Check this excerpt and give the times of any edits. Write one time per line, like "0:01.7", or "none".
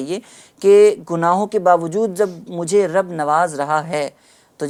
none